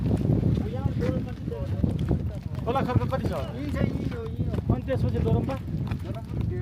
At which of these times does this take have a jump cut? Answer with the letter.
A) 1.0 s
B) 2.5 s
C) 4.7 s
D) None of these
B